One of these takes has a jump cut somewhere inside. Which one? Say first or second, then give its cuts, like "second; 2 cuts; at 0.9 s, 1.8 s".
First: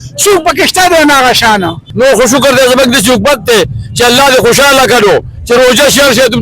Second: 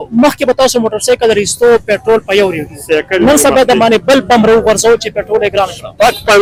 first; 1 cut; at 1.9 s